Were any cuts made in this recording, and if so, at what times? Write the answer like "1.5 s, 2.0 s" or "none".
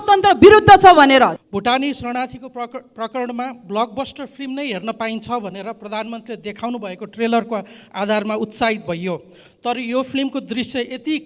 1.3 s